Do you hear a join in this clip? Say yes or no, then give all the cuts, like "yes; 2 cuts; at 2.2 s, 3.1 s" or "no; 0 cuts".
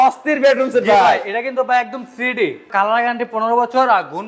yes; 1 cut; at 2.7 s